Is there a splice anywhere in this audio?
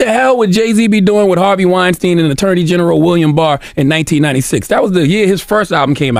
no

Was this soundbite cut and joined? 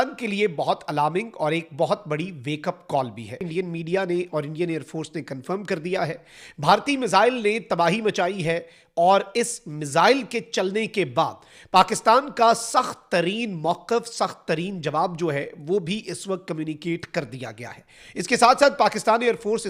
no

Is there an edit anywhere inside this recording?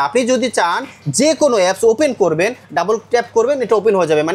no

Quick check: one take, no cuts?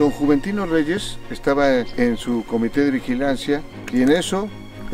no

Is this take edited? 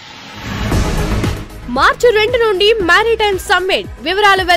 yes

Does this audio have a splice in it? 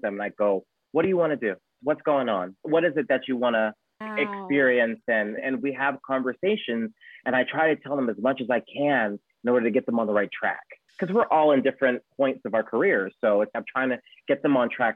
no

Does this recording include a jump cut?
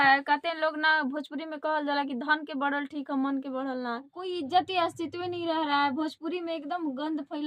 yes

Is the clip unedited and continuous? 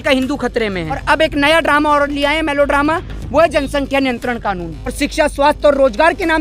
no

